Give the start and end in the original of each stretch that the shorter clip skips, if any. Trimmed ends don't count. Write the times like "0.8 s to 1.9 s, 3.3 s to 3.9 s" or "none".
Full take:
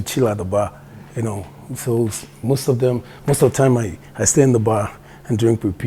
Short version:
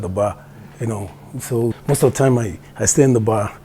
2.2 s to 3.2 s